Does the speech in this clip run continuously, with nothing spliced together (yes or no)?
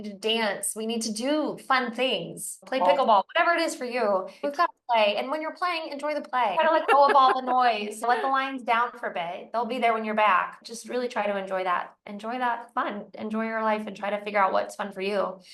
no